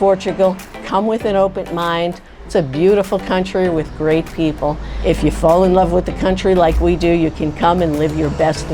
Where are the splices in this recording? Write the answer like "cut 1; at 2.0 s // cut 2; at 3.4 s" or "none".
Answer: cut 1; at 2.3 s // cut 2; at 4.9 s